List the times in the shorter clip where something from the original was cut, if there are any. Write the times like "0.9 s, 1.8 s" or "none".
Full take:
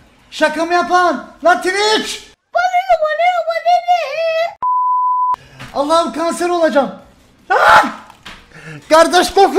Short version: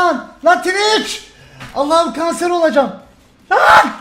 1.4 s